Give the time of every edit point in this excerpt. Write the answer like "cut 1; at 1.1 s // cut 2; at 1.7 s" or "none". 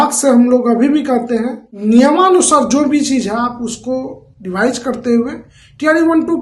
cut 1; at 1.6 s